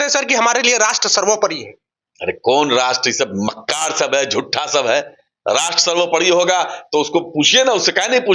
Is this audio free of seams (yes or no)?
yes